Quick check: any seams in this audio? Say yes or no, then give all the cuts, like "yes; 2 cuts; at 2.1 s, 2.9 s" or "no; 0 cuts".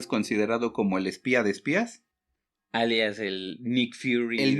no; 0 cuts